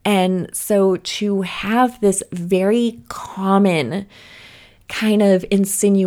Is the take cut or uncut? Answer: uncut